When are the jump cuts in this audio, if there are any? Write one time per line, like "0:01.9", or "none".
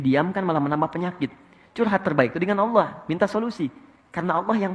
none